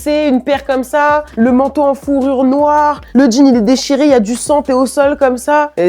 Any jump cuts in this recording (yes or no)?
yes